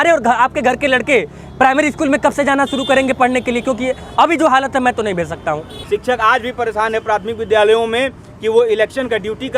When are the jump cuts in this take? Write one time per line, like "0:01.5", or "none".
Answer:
0:05.8